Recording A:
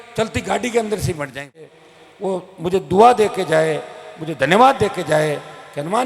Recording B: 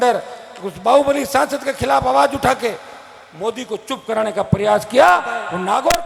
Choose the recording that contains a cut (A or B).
A